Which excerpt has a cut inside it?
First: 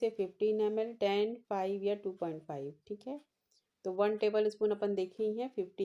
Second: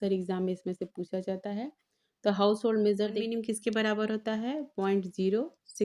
second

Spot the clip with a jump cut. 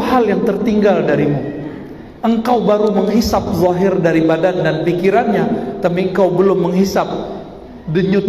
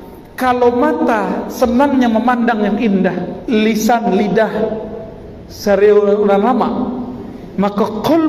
second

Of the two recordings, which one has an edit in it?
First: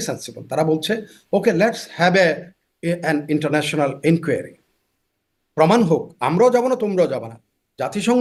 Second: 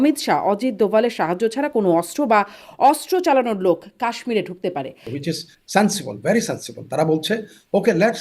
second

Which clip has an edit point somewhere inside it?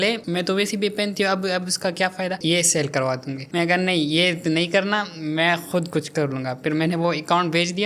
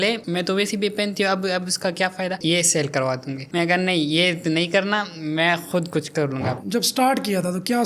second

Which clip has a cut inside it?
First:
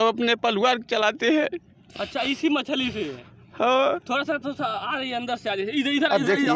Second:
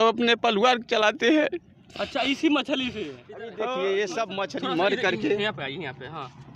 second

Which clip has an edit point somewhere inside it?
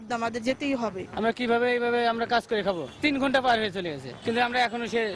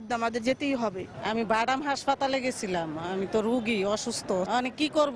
first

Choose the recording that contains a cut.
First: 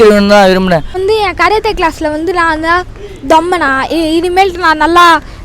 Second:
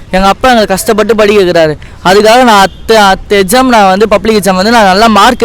first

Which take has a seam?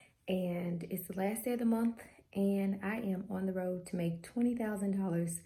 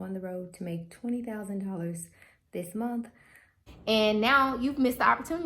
second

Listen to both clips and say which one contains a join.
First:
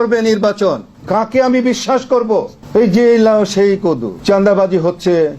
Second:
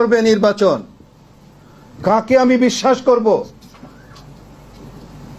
first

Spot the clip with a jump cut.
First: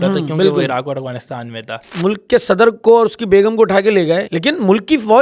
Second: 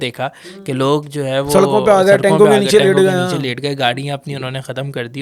first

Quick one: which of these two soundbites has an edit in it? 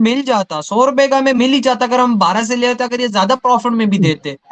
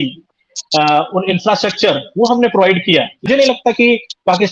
second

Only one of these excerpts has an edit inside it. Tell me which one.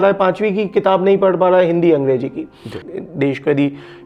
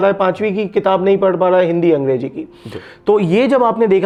first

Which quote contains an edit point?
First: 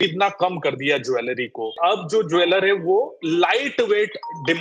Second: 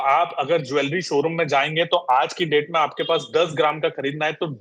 first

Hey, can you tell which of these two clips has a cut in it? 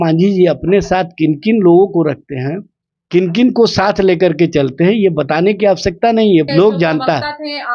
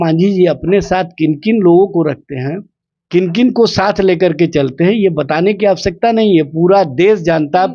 first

